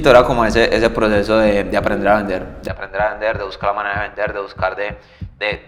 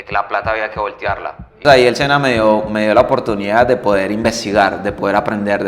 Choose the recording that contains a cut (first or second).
second